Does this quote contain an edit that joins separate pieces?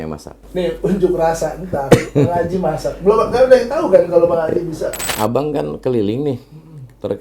yes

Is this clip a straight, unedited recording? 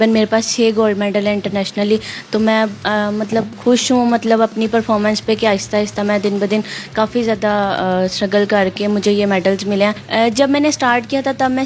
yes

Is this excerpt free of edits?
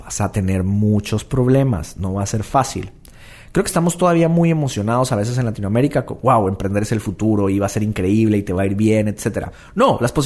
yes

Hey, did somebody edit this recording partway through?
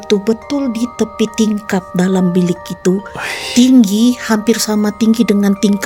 no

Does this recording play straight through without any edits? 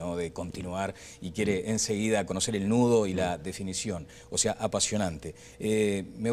no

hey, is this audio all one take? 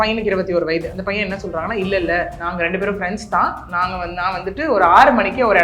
no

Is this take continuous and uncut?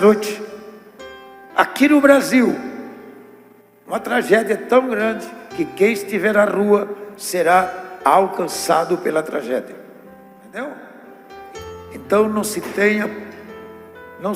no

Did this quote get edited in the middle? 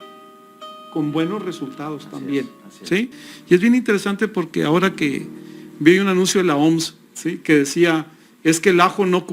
yes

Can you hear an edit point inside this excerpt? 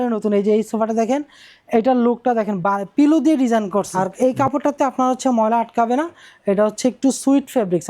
yes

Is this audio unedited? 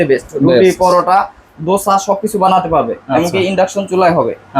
yes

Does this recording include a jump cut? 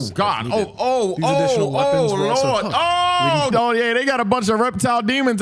yes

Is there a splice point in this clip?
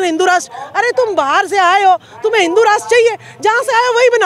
no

